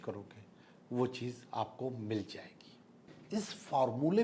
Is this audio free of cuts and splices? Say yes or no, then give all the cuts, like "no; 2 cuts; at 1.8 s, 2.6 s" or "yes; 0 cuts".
no; 1 cut; at 3.1 s